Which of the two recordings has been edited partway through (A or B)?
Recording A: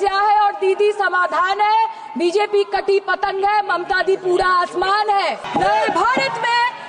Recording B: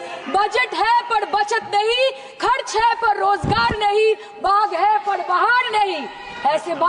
A